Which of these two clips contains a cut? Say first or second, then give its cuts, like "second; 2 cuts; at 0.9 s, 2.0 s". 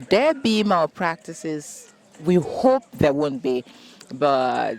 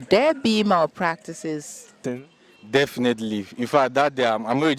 second; 1 cut; at 2.1 s